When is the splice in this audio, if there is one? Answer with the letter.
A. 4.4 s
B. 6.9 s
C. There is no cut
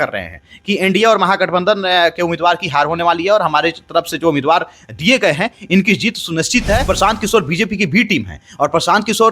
B